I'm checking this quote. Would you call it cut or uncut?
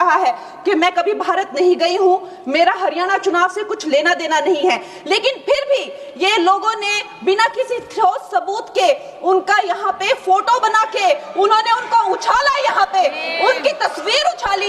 uncut